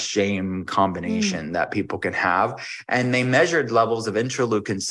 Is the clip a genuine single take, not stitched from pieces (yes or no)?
yes